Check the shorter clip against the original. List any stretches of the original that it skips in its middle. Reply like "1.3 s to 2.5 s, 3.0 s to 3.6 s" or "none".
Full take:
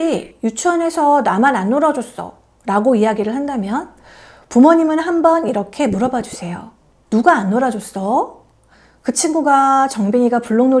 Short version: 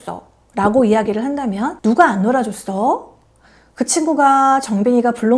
3.9 s to 7.0 s

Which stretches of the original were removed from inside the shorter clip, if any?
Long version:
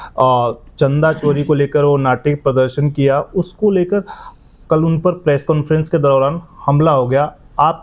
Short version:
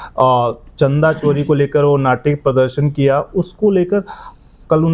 none

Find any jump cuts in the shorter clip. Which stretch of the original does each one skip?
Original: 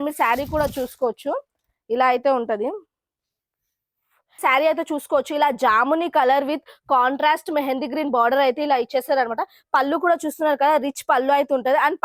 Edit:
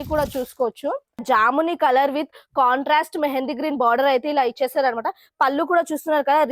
1.6 s to 5.6 s

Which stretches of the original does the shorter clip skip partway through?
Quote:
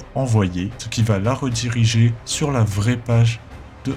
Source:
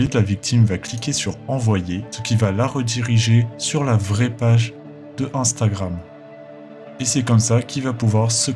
none

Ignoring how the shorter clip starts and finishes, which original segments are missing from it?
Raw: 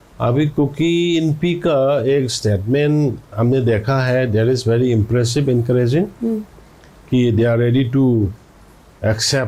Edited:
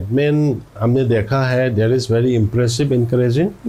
none

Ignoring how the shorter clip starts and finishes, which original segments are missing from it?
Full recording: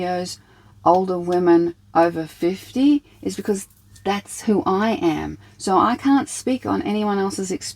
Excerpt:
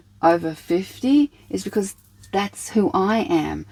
none

